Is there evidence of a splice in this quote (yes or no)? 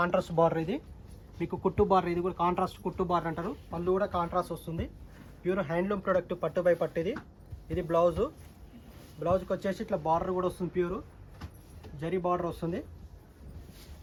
no